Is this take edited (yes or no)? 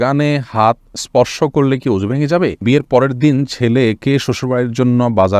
yes